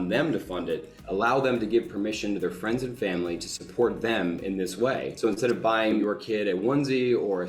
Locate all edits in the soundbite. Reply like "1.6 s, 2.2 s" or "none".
5.1 s, 6.0 s